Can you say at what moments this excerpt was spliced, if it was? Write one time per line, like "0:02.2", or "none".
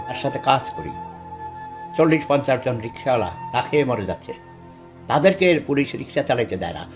none